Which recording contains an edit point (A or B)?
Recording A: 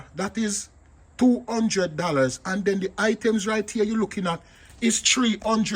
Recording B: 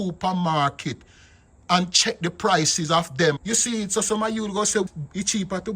B